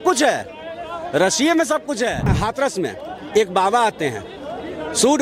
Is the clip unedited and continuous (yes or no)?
no